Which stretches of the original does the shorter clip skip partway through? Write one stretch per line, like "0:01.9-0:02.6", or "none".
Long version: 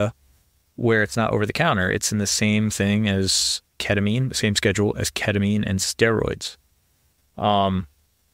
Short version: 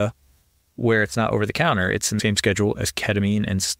0:02.2-0:04.4